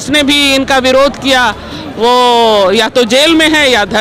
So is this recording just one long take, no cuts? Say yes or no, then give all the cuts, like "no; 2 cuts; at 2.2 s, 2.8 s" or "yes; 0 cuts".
yes; 0 cuts